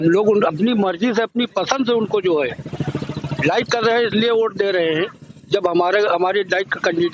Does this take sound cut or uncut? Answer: uncut